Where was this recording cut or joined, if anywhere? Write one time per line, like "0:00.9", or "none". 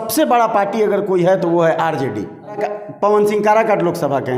0:02.6